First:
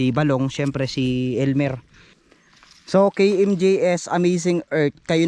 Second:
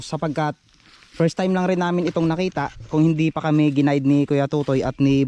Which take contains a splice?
first; 1 cut; at 2.5 s

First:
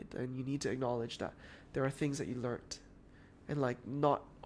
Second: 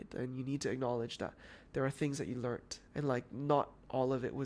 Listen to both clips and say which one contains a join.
second; 1 cut; at 2.8 s

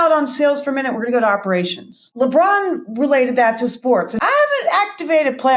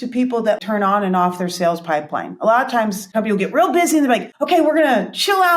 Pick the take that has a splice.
first; 2 cuts; at 2.1 s, 4.2 s

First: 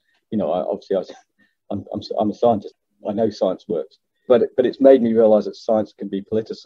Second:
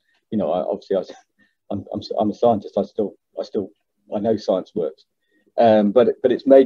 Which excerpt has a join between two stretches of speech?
first; 2 cuts; at 2.7 s, 4.3 s

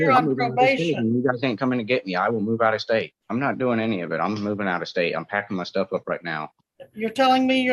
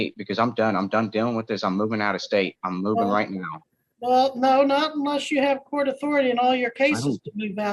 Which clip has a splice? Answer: first; 1 cut; at 3.2 s

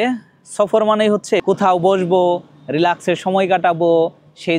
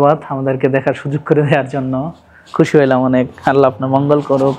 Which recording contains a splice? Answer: first; 1 cut; at 1.4 s

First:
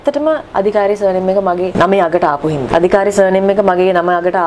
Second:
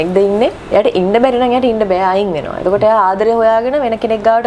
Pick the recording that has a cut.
first; 2 cuts; at 1.7 s, 2.7 s

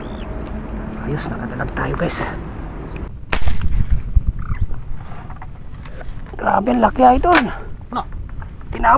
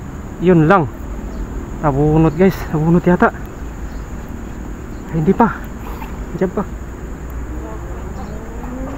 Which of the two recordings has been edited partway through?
first; 1 cut; at 3.1 s

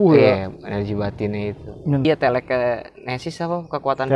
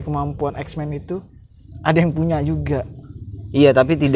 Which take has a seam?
first; 1 cut; at 2.0 s

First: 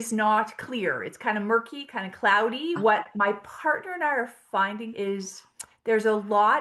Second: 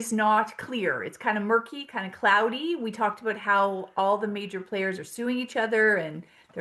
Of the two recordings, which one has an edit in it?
first; 2 cuts; at 2.8 s, 4.9 s

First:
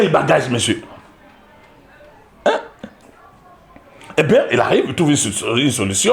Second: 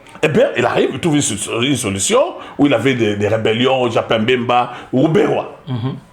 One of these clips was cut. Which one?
first; 1 cut; at 2.9 s

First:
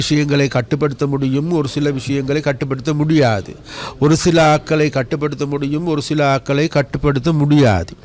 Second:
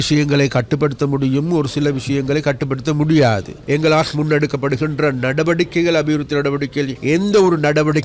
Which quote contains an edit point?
second; 2 cuts; at 3.5 s, 7.0 s

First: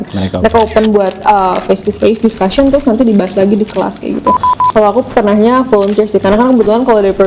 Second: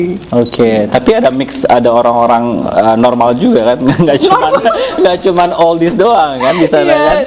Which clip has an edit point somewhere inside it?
first; 1 cut; at 4.6 s

